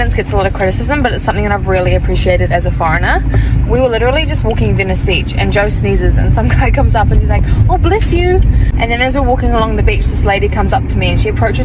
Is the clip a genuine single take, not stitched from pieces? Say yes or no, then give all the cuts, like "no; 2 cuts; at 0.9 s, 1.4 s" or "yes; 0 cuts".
yes; 0 cuts